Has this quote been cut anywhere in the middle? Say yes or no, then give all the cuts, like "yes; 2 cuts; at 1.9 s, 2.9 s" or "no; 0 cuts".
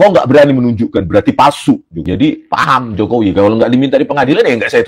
yes; 1 cut; at 1.9 s